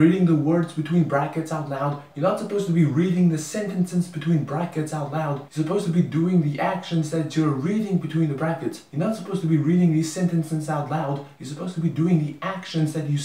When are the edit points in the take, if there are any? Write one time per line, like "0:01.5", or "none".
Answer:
none